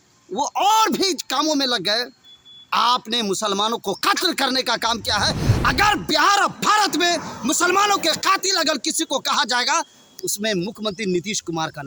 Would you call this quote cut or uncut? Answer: uncut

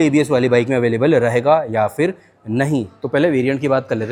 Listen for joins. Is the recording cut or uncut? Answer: uncut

